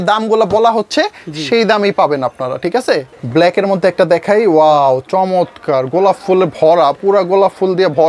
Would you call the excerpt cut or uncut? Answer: cut